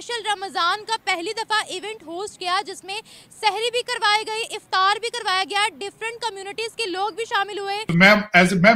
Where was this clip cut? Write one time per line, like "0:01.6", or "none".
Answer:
0:07.8